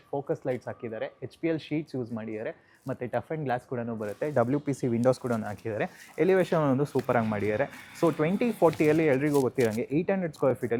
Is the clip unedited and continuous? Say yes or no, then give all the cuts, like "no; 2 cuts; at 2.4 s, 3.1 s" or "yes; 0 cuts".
yes; 0 cuts